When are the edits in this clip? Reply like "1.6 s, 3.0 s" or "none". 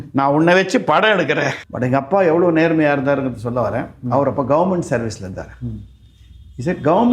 1.6 s